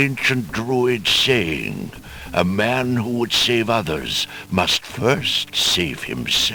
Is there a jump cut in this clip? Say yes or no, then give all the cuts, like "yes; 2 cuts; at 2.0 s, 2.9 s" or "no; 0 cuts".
no; 0 cuts